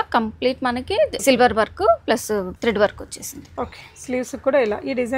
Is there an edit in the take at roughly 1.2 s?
yes; 2 cuts; at 1.2 s, 2.5 s

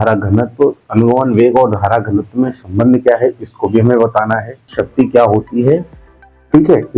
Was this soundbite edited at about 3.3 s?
no; 1 cut; at 4.8 s

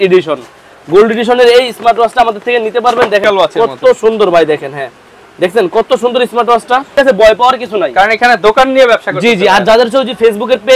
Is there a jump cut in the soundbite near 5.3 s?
no; 2 cuts; at 3.2 s, 6.9 s

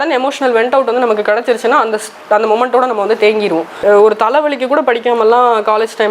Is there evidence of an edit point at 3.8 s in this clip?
yes; 1 cut; at 3.8 s

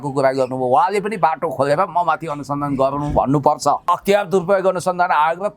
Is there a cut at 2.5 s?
no; 1 cut; at 3.9 s

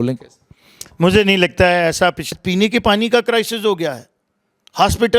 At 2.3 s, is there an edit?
yes; 1 cut; at 2.3 s

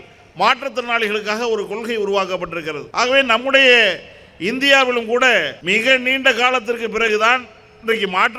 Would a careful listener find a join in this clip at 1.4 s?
no; 2 cuts; at 2.8 s, 5.6 s

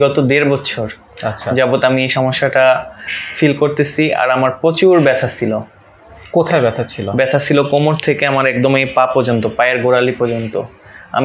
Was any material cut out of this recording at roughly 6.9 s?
no; 0 cuts

